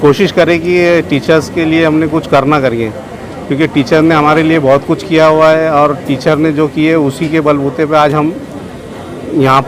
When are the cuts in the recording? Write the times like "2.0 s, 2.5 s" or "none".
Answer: none

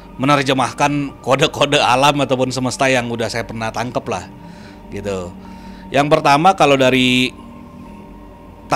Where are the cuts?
none

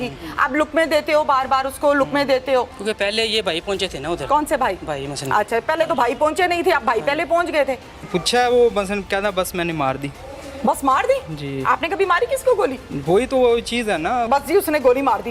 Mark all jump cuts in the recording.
2.8 s, 8.0 s, 14.3 s

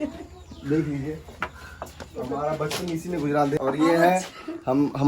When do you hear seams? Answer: 3.5 s

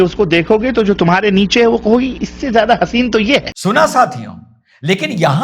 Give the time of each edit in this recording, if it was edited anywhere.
none

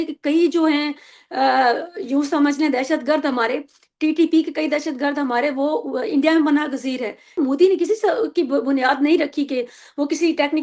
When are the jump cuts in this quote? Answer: 7.4 s

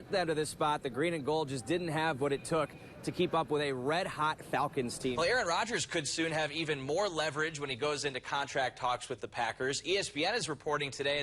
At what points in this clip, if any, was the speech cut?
5.1 s

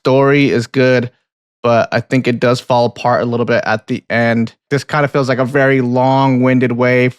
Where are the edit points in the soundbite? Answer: 4.7 s

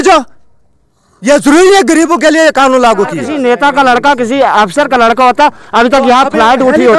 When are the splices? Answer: 3.3 s

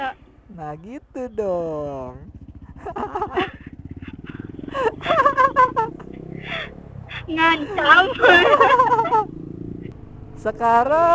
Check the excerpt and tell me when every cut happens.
9.9 s

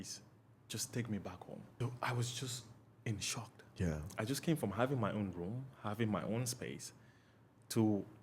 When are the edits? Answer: 1.7 s

